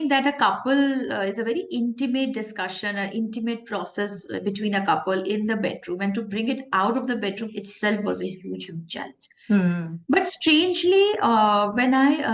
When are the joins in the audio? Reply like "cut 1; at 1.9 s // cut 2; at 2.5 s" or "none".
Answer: none